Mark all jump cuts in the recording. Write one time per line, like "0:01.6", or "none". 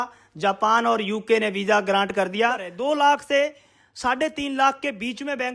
0:02.7